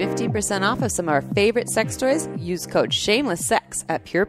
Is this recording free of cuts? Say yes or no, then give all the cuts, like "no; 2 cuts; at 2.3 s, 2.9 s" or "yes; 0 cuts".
yes; 0 cuts